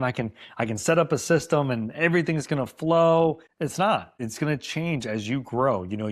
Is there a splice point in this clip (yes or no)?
yes